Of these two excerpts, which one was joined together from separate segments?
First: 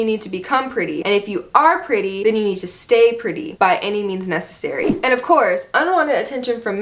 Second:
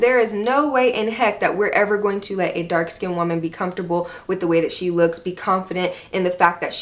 first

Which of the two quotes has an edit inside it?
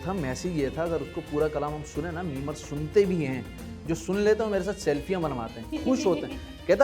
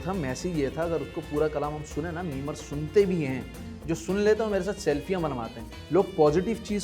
second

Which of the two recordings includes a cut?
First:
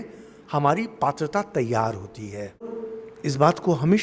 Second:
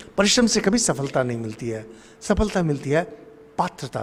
first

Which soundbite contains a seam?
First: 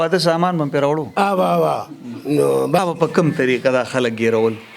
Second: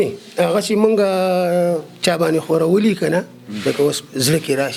first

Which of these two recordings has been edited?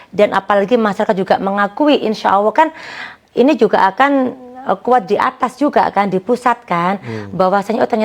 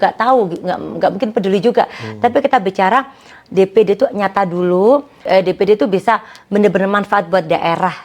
second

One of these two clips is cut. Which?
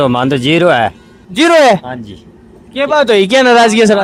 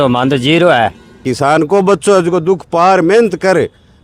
second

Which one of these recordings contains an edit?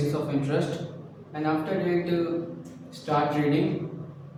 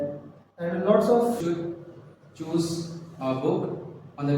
second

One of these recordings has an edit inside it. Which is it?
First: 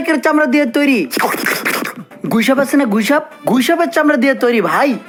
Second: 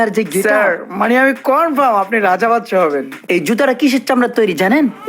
second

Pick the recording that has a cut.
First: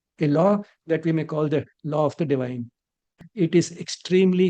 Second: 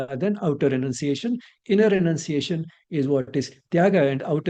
first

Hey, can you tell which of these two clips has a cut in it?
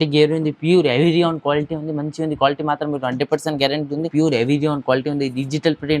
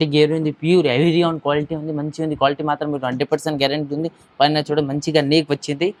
first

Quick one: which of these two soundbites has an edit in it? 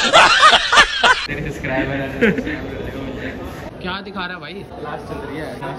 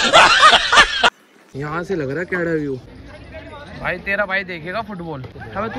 second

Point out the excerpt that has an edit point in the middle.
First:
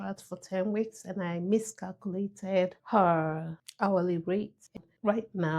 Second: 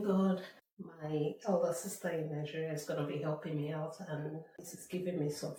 first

